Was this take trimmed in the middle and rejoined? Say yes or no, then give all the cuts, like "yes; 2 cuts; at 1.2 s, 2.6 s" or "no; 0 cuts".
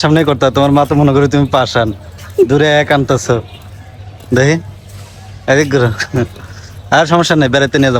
no; 0 cuts